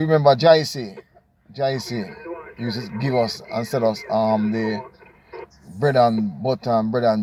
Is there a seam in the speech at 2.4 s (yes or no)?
no